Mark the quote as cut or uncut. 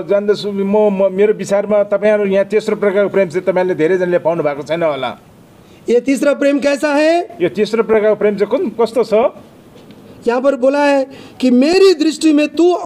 uncut